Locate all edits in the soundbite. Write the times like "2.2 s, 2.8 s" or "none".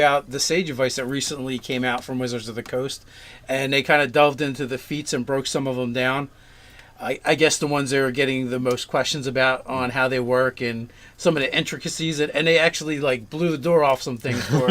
5.5 s